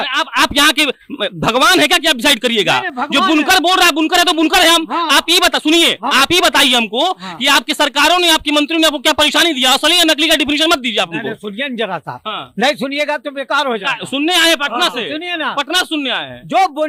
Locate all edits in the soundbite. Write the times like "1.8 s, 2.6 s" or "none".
none